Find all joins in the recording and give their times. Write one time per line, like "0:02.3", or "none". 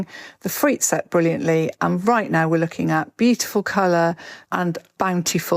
0:04.5